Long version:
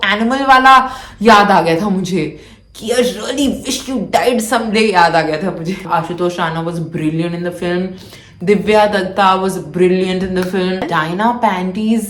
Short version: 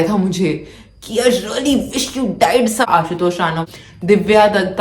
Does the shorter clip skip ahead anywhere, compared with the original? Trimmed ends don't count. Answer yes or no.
yes